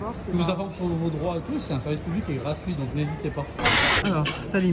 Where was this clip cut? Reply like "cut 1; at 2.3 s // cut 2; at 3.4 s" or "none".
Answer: none

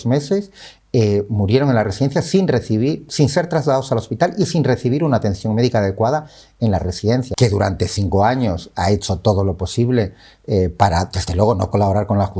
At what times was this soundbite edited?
cut 1; at 7.3 s

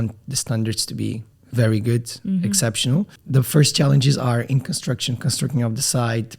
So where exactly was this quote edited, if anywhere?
cut 1; at 1.3 s // cut 2; at 3.2 s

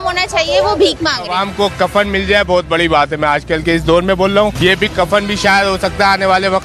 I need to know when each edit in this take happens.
cut 1; at 1.3 s

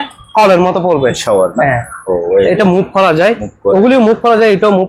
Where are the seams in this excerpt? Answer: cut 1; at 1.2 s

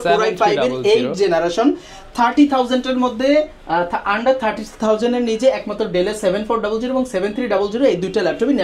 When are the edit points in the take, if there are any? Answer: none

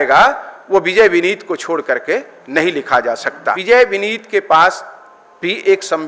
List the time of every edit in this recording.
cut 1; at 3.4 s

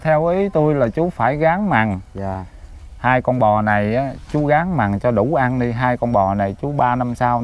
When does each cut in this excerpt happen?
none

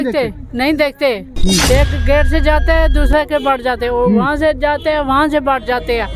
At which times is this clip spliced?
none

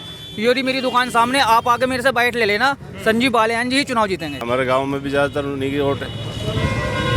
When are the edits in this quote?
cut 1; at 4.4 s

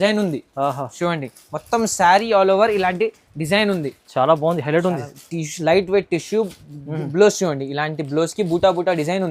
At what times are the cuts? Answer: none

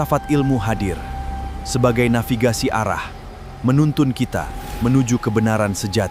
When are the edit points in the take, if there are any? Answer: none

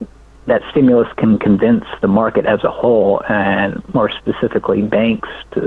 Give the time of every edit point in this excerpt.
none

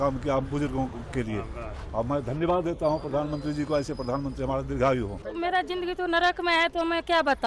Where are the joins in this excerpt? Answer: cut 1; at 5.2 s

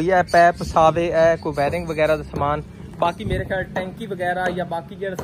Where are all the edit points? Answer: none

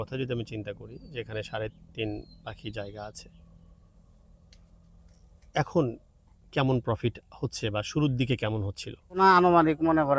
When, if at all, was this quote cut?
cut 1; at 9.2 s

